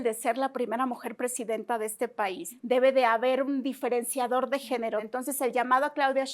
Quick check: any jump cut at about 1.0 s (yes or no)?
no